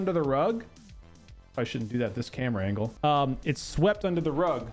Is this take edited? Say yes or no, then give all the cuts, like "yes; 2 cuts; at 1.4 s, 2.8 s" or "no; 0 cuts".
yes; 1 cut; at 2.9 s